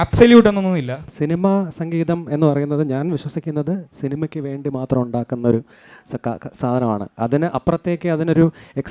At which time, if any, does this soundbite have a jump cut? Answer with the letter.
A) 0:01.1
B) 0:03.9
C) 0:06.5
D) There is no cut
A